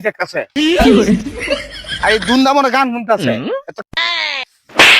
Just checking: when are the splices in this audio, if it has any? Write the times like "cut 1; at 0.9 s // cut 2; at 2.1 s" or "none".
cut 1; at 3.8 s